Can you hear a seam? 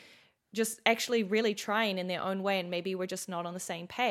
no; 0 cuts

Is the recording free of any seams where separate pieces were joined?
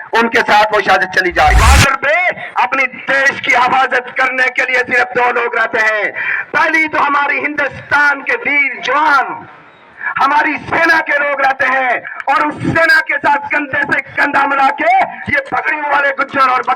no; 1 cut; at 1.5 s

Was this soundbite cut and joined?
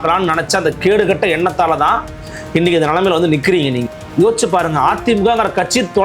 yes; 1 cut; at 3.9 s

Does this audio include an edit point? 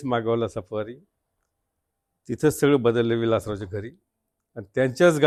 no; 0 cuts

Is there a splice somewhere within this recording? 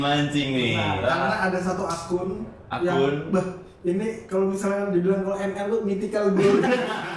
no; 0 cuts

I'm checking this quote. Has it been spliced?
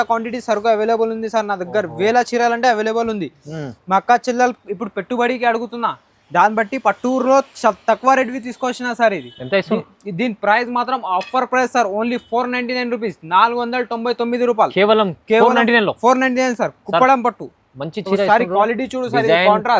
no; 0 cuts

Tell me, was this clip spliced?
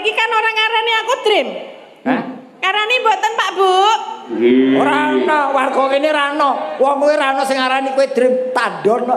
no; 0 cuts

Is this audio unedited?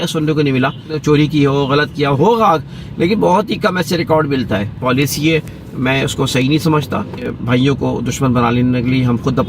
no; 3 cuts; at 1.0 s, 4.7 s, 7.3 s

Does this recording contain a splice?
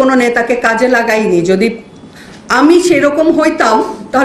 no; 0 cuts

